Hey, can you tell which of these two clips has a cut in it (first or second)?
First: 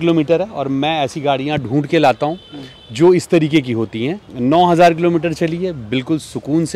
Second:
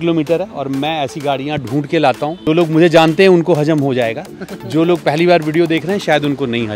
second